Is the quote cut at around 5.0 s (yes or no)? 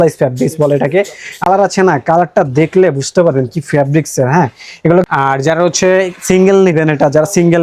yes